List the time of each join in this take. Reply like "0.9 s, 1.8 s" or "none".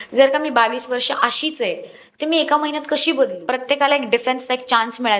3.5 s